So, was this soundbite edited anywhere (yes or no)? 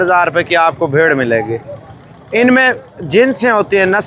no